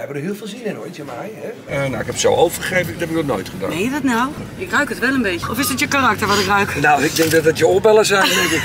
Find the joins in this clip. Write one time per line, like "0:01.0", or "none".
0:01.6
0:04.4
0:05.4